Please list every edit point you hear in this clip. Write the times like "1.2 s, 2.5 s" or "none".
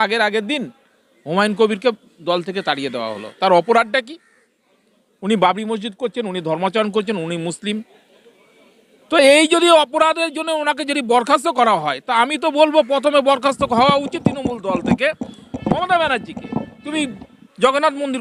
none